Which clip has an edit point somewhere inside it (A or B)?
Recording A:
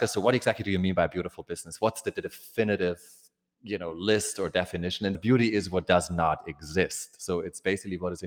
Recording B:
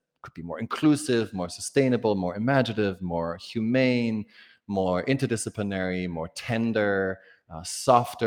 A